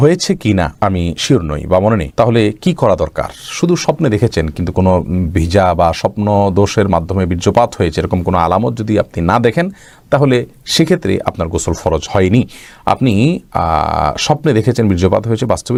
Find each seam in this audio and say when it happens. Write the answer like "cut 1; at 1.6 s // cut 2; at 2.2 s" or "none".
none